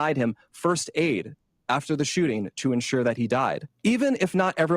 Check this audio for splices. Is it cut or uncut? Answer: cut